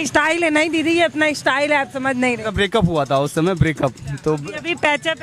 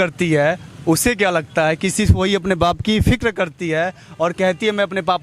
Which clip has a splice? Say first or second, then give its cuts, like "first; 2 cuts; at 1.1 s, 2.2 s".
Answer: first; 1 cut; at 2.5 s